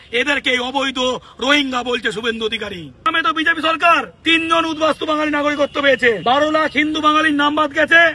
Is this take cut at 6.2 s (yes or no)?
yes